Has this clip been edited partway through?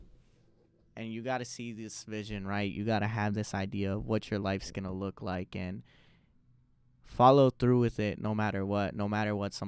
no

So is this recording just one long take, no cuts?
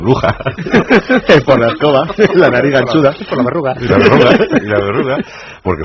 no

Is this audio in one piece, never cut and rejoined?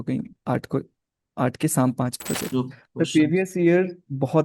no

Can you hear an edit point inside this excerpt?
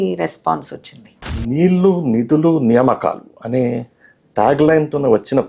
yes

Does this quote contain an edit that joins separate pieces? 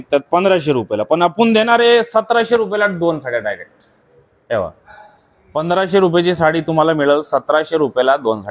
no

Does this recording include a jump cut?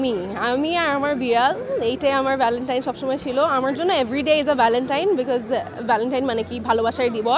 no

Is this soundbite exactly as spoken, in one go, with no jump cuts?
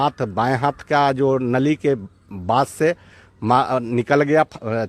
yes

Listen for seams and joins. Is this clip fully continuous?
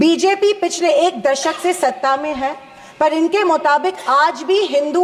yes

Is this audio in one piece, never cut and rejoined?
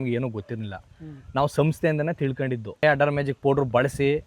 no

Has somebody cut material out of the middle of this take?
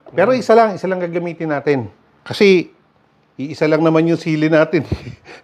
no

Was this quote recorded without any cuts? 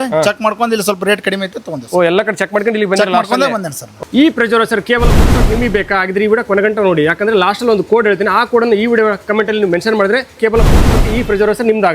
yes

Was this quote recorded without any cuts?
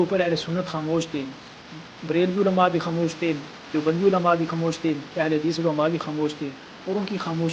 yes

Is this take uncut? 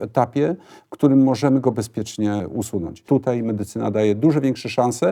no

